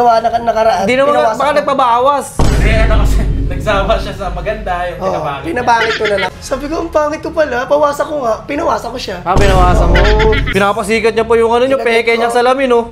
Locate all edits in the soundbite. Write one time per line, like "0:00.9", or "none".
0:06.3
0:10.4